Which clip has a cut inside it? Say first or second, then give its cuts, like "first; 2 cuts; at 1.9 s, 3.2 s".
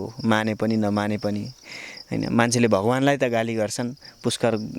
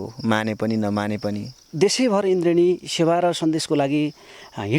second; 1 cut; at 1.6 s